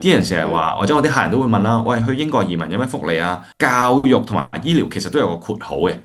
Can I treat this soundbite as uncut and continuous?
no; 1 cut; at 3.5 s

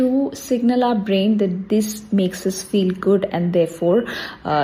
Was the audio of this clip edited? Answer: no; 0 cuts

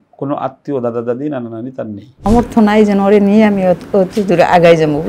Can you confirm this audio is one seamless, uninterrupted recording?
no; 1 cut; at 2.2 s

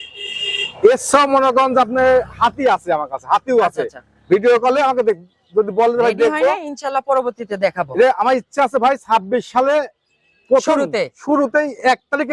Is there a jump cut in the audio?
no; 0 cuts

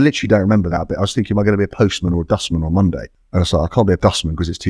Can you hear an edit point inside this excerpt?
yes; 2 cuts; at 3.1 s, 4.0 s

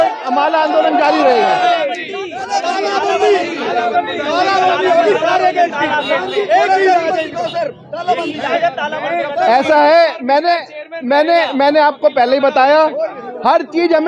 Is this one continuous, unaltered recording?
yes; 0 cuts

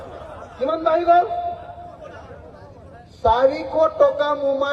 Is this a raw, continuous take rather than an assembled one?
yes; 0 cuts

